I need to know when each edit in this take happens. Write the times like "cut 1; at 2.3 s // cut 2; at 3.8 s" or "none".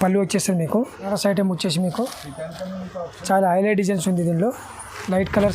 cut 1; at 1.1 s